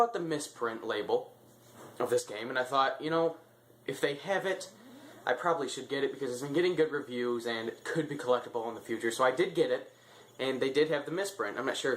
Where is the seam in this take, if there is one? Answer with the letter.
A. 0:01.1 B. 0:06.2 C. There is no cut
A